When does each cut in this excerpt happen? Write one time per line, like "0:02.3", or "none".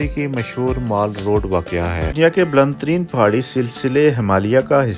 0:02.1